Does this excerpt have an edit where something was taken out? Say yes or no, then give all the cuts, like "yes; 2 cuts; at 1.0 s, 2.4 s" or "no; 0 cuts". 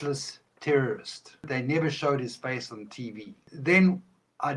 yes; 2 cuts; at 1.5 s, 3.5 s